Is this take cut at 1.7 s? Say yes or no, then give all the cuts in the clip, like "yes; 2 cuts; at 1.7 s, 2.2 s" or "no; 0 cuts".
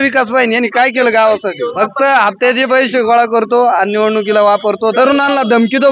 yes; 2 cuts; at 1.7 s, 4.9 s